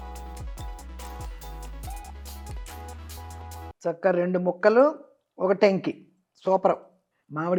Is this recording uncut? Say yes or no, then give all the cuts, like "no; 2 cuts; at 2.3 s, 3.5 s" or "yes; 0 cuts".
yes; 0 cuts